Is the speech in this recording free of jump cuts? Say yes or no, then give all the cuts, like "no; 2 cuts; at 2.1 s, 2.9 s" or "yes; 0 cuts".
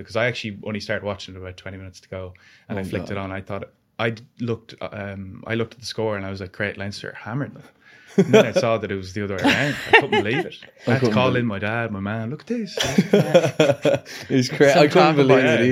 yes; 0 cuts